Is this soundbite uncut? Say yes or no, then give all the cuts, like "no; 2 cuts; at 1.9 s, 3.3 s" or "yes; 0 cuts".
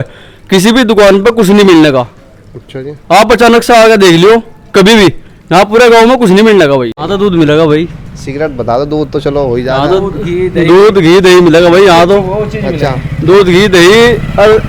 no; 1 cut; at 7.0 s